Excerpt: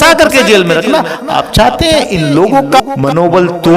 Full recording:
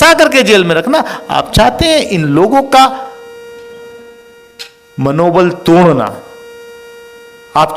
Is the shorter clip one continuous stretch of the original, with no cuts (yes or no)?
no